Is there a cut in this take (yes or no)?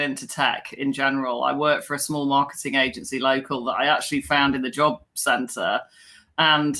no